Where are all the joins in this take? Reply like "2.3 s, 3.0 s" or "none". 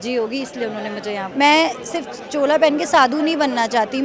1.2 s